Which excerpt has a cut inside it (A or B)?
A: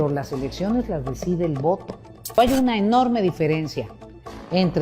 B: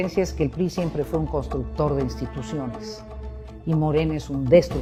A